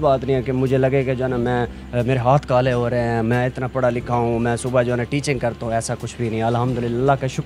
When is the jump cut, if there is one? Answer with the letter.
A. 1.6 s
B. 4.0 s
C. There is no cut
C